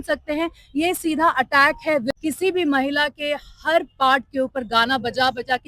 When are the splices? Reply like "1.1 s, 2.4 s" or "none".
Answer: 2.1 s